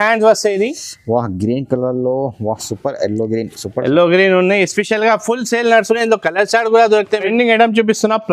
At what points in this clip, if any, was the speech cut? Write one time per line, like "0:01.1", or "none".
0:07.3